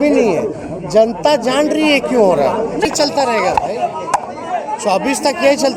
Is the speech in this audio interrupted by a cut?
yes; 1 cut; at 2.9 s

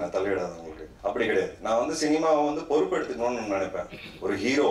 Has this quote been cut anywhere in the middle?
no; 0 cuts

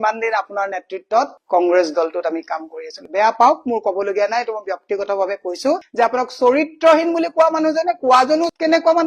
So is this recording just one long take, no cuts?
yes; 0 cuts

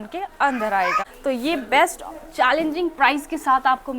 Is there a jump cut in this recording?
yes; 1 cut; at 1.1 s

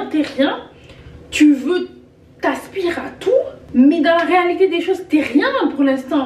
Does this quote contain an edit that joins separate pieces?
yes; 1 cut; at 3.6 s

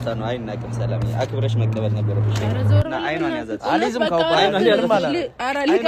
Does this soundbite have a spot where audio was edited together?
yes; 1 cut; at 2.6 s

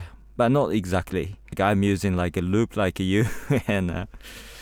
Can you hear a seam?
yes; 1 cut; at 1.5 s

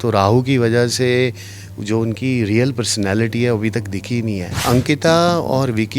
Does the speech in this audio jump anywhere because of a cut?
yes; 1 cut; at 4.5 s

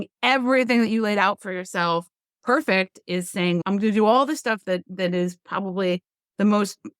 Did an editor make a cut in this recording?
yes; 1 cut; at 3.6 s

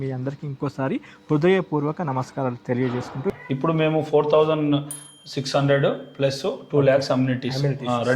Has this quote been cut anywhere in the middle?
yes; 1 cut; at 3.3 s

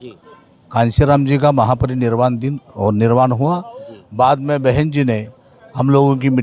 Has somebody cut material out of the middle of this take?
no; 0 cuts

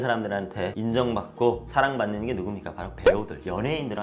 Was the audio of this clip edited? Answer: no; 0 cuts

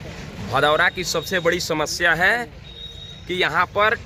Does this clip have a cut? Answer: no; 0 cuts

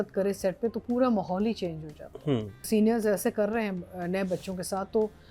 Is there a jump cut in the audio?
yes; 1 cut; at 2.7 s

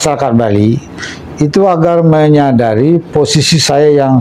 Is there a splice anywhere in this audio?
no; 0 cuts

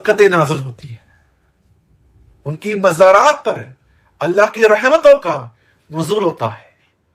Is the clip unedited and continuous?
yes; 0 cuts

